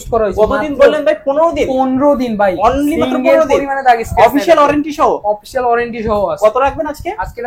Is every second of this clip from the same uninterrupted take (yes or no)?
yes